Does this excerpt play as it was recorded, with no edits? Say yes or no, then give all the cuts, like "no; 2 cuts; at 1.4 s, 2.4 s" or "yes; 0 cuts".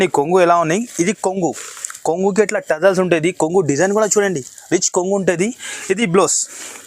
yes; 0 cuts